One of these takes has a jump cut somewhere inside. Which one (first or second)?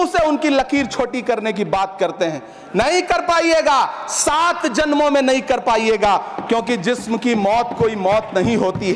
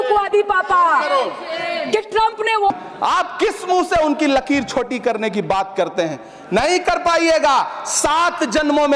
second